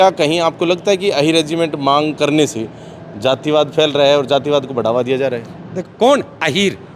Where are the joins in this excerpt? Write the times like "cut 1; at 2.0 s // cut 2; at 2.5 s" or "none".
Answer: cut 1; at 5.7 s